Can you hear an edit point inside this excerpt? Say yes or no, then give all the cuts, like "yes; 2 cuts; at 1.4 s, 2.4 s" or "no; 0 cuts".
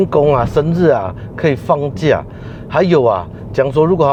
no; 0 cuts